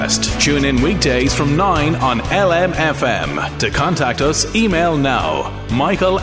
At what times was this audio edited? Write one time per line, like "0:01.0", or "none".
none